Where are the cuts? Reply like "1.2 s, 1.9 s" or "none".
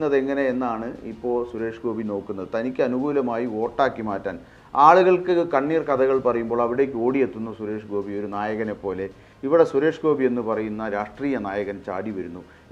9.2 s